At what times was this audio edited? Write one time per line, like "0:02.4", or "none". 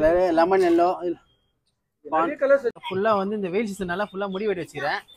0:02.8